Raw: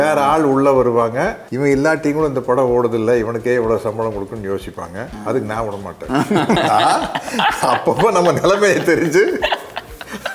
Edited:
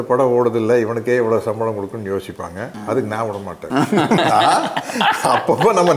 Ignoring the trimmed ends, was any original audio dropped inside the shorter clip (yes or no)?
no